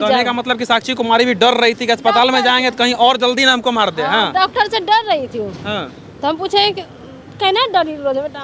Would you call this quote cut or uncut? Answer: uncut